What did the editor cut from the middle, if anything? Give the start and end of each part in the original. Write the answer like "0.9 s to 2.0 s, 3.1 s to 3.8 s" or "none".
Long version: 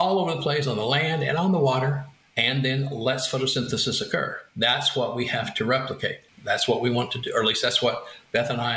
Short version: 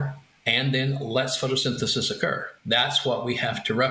none